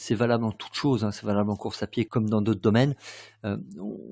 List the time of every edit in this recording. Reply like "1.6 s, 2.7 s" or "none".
2.1 s